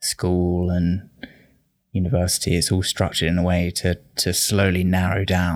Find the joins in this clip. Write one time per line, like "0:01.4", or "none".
none

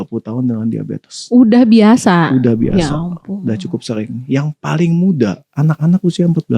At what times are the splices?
0:05.5

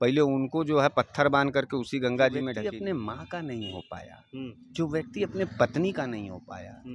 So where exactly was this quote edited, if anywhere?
0:02.6

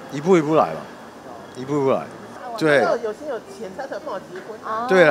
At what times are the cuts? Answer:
none

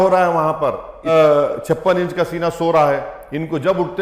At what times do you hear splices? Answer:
0:01.1

